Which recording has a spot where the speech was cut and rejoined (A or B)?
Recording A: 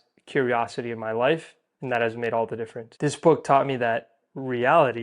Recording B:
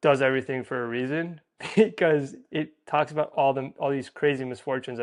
A